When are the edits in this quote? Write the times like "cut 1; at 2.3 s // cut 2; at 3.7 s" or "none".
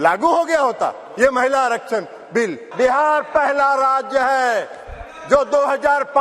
cut 1; at 2.6 s